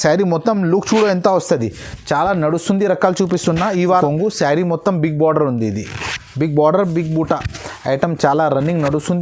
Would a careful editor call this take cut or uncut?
cut